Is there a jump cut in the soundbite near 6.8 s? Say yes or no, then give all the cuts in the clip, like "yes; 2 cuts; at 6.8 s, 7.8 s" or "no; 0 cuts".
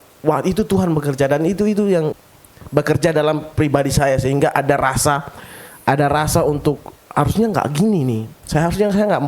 no; 1 cut; at 2.2 s